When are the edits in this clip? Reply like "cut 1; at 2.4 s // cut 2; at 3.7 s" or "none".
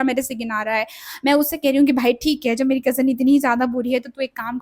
none